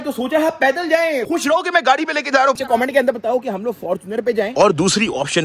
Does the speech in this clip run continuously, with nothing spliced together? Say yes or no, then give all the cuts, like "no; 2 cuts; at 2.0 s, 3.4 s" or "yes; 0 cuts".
no; 3 cuts; at 1.2 s, 2.6 s, 4.5 s